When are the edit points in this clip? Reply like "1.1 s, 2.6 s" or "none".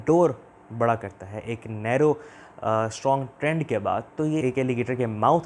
4.4 s